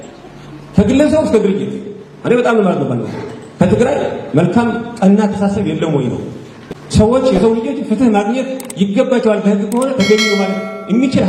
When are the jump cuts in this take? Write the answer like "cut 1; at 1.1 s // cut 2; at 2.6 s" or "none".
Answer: none